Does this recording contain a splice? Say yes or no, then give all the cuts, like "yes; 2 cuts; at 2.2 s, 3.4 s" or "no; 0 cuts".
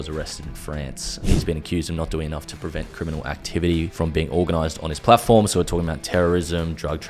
yes; 2 cuts; at 1.2 s, 3.9 s